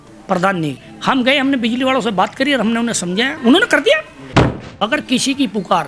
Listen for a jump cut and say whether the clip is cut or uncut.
cut